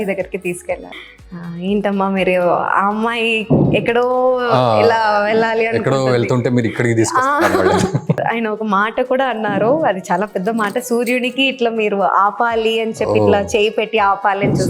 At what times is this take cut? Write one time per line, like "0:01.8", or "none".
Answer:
0:00.9
0:08.2

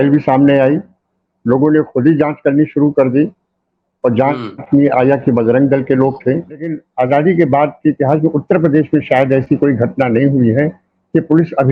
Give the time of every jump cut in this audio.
0:06.8

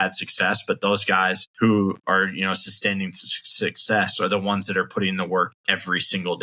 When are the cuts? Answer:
0:01.4

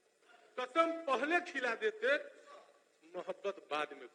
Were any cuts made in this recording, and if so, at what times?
none

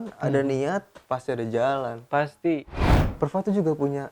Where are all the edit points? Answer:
0:02.9

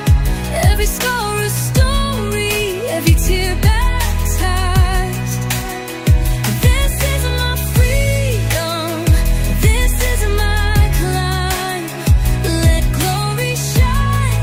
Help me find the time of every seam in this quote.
none

